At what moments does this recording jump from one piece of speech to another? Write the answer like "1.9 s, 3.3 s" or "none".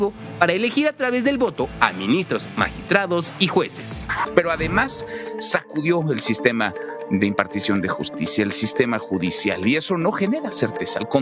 4.3 s